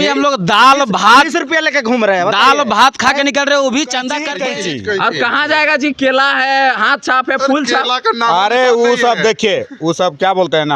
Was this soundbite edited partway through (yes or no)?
yes